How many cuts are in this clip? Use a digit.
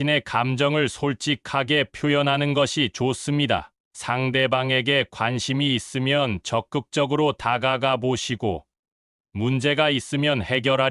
0